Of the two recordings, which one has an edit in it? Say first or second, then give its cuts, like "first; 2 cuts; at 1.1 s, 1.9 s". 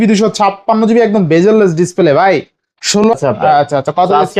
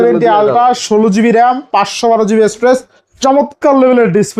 first; 1 cut; at 3.1 s